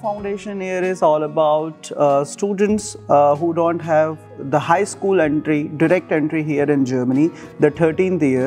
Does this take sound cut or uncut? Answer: uncut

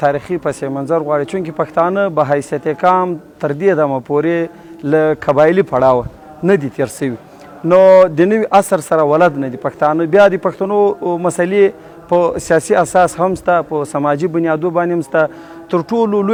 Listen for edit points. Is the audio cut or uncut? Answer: uncut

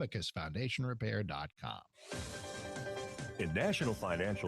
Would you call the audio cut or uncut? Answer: cut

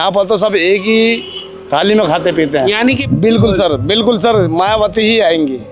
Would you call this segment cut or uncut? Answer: cut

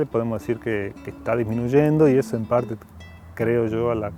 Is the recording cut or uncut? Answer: uncut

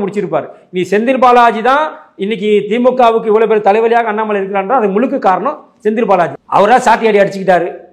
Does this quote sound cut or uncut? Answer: cut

